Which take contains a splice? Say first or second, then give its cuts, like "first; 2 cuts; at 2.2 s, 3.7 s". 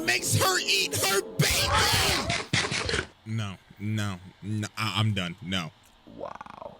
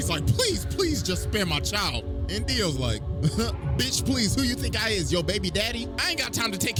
first; 1 cut; at 5.8 s